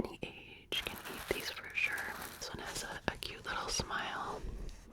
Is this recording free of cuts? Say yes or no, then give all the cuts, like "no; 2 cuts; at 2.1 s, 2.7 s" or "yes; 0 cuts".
no; 1 cut; at 2.4 s